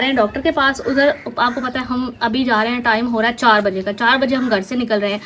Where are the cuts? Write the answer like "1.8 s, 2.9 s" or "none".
none